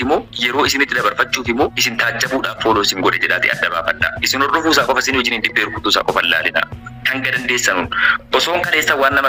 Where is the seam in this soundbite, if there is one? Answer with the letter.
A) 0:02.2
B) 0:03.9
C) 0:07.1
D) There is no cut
D